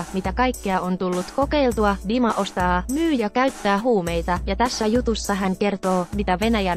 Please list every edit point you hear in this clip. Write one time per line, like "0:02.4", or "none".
none